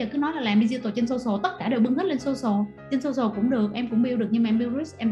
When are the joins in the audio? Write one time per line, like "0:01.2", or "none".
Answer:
0:02.8